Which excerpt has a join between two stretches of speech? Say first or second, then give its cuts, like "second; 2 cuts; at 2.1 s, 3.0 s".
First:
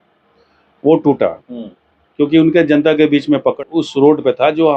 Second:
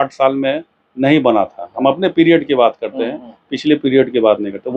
first; 1 cut; at 3.6 s